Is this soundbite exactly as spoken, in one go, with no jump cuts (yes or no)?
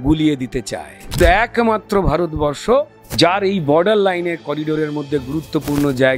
no